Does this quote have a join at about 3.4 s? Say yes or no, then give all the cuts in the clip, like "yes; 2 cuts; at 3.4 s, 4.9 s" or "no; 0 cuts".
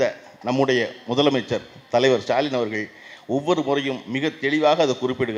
no; 0 cuts